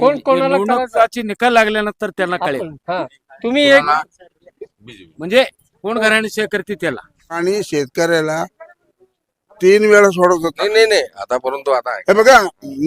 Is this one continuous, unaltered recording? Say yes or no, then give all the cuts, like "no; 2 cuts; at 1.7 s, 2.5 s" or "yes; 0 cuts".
no; 1 cut; at 7.4 s